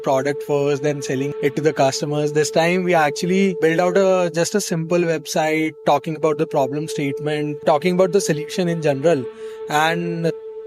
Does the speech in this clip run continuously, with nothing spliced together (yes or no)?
no